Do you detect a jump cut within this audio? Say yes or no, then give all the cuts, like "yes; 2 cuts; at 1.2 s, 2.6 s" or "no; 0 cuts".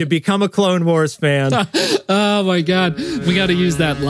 yes; 1 cut; at 3.2 s